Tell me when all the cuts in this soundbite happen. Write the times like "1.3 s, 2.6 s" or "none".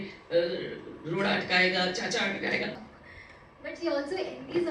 2.9 s